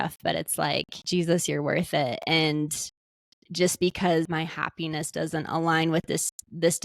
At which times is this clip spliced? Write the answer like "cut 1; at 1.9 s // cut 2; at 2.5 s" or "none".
cut 1; at 1.0 s // cut 2; at 4.3 s